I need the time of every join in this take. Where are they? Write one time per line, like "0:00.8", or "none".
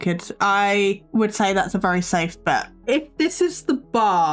0:01.0
0:02.7